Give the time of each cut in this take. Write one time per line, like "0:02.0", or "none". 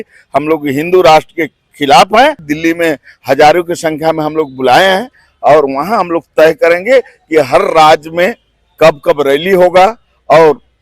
0:02.5